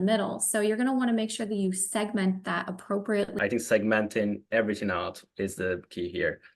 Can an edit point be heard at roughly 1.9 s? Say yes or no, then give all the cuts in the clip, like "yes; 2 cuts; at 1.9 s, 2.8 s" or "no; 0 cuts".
no; 1 cut; at 3.3 s